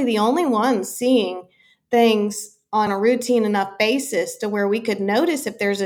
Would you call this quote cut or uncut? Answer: uncut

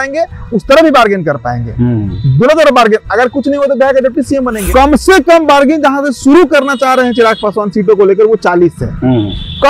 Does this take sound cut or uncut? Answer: cut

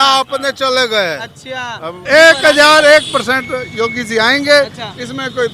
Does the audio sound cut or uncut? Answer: cut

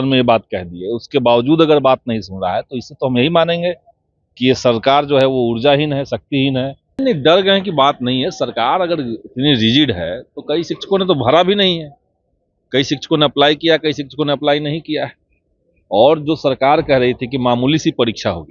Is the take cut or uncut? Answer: cut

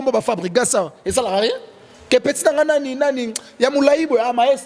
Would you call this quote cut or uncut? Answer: uncut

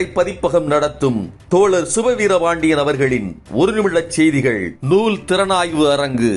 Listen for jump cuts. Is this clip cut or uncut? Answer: uncut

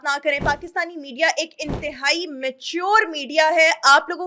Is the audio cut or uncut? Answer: uncut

